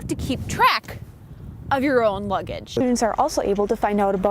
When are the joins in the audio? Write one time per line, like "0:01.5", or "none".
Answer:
0:02.7